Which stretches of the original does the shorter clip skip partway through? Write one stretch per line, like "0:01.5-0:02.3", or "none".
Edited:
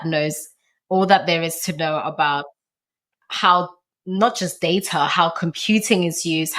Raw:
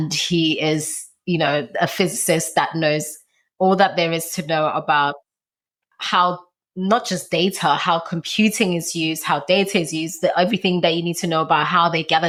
none